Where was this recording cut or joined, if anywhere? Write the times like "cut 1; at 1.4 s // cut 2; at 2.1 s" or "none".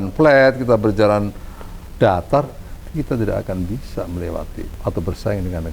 cut 1; at 4.6 s